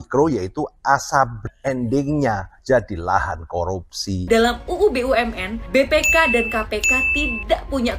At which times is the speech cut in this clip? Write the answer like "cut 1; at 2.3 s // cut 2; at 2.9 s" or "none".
cut 1; at 4.2 s